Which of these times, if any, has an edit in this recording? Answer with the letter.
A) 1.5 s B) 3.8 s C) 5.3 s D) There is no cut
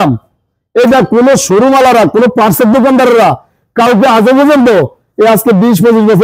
D